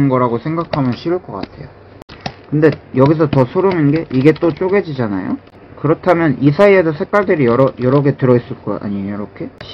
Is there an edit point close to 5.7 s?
yes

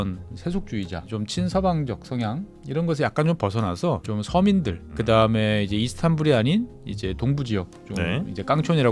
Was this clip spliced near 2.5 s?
yes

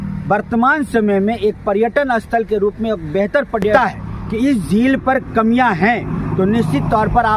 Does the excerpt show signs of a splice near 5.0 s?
no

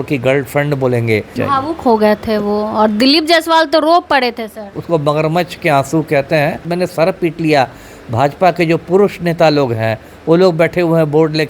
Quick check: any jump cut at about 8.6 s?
no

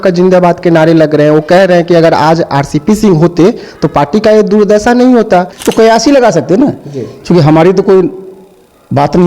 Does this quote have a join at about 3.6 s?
no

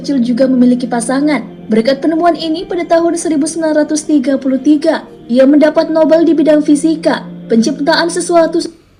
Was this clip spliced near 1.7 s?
no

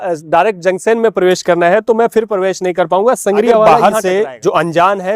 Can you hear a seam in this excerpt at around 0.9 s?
no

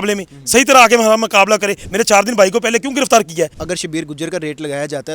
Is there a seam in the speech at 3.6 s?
yes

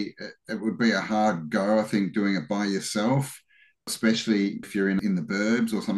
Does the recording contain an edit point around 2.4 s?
no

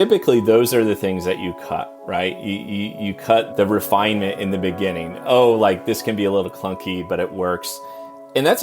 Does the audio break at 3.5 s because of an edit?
yes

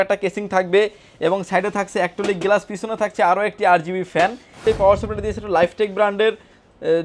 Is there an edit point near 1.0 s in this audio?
no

